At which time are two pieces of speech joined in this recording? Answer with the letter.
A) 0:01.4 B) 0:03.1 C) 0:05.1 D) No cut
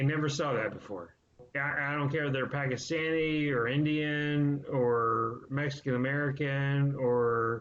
A